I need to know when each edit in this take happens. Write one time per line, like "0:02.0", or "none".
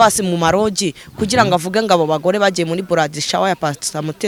none